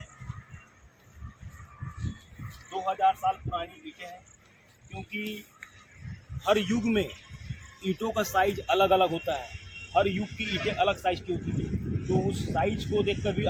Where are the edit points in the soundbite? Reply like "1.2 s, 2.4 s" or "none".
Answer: none